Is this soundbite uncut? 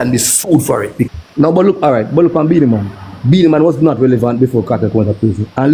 no; 1 cut; at 1.1 s

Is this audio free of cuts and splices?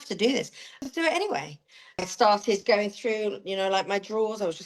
no; 2 cuts; at 0.8 s, 2.1 s

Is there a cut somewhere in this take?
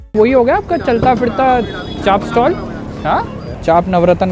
no; 0 cuts

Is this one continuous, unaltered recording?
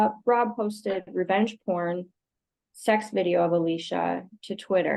yes; 0 cuts

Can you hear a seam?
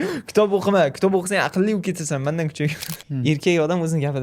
yes; 1 cut; at 2.9 s

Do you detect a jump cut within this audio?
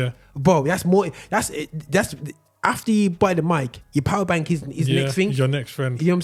no; 0 cuts

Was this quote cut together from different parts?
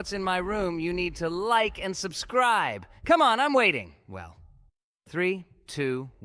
no; 0 cuts

